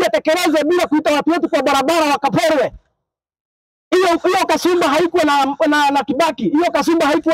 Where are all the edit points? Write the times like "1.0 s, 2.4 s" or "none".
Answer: none